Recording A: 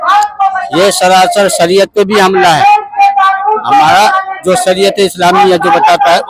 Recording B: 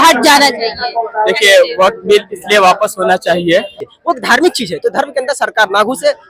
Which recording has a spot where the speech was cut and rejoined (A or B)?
B